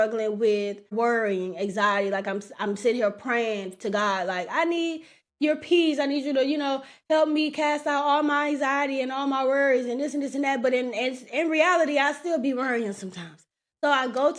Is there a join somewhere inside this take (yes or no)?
yes